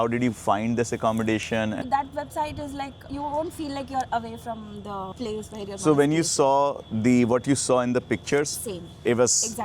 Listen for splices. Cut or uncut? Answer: cut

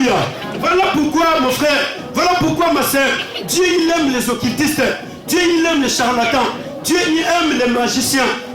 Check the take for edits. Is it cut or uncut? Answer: uncut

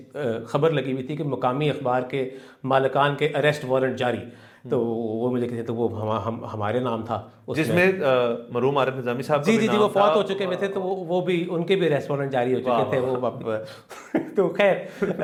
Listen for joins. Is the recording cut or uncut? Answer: uncut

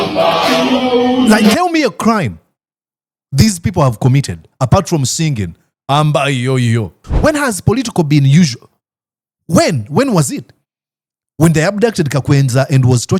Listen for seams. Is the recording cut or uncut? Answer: cut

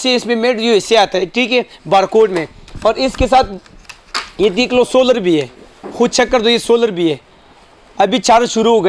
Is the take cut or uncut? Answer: uncut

